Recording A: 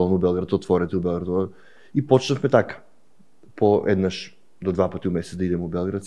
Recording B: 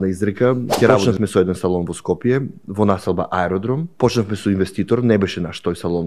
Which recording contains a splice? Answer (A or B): B